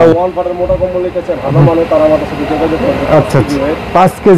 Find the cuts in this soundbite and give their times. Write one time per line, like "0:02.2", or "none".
none